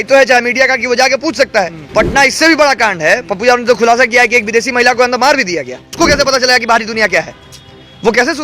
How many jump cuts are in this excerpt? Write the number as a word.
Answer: two